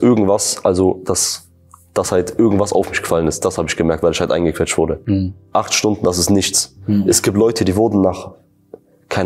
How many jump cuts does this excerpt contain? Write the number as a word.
one